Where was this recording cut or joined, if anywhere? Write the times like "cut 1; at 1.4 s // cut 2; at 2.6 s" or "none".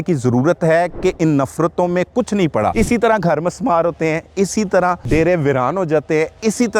cut 1; at 2.7 s // cut 2; at 5.0 s